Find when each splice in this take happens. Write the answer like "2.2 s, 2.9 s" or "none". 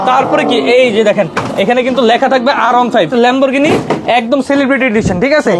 3.1 s